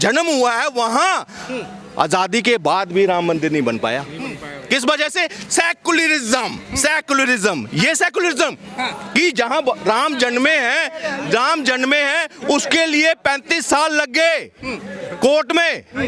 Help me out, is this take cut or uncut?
uncut